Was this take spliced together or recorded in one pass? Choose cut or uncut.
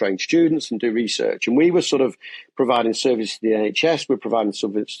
uncut